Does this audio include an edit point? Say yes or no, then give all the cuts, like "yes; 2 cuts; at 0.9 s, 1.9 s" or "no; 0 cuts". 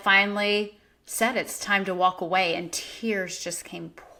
no; 0 cuts